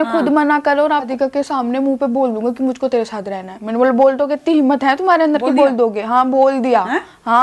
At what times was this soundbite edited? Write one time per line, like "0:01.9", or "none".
0:01.1